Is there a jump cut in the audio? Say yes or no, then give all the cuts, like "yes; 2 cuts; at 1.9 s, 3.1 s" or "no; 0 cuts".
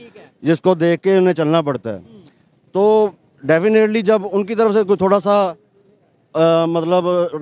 no; 0 cuts